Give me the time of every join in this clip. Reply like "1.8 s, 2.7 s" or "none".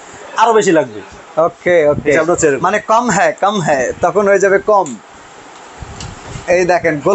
none